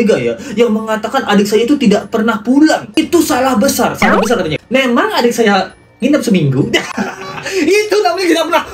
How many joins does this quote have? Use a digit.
1